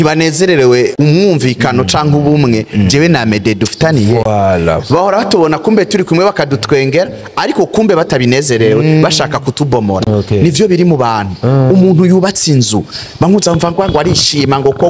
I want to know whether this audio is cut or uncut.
cut